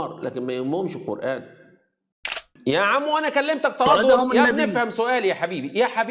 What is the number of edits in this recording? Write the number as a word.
one